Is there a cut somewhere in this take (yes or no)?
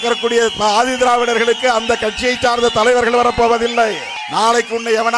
yes